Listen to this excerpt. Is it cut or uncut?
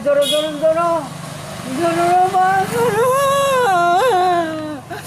uncut